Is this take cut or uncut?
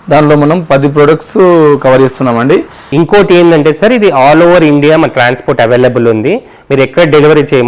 cut